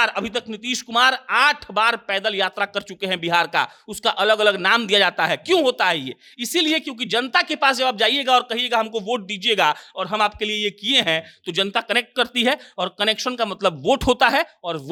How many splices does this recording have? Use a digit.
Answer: 0